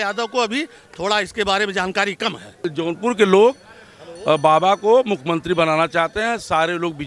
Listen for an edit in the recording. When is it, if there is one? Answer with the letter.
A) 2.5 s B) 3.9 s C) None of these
A